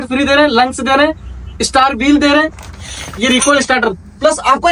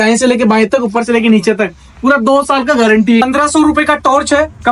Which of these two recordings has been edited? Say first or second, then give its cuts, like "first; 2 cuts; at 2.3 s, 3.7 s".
second; 1 cut; at 3.2 s